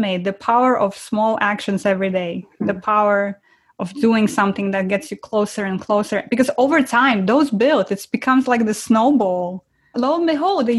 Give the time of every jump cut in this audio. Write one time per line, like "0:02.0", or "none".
none